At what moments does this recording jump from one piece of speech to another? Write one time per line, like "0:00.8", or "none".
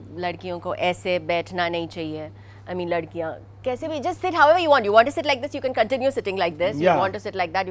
none